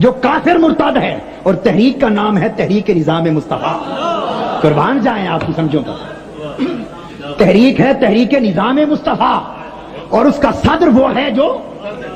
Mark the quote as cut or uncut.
uncut